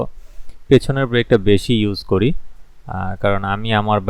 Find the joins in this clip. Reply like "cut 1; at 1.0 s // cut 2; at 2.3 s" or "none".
none